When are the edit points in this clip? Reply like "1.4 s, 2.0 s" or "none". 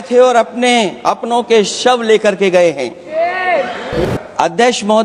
4.0 s